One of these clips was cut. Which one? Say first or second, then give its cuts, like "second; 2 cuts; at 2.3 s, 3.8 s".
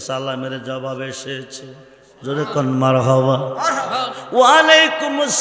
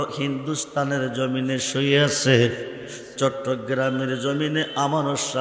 first; 1 cut; at 4.1 s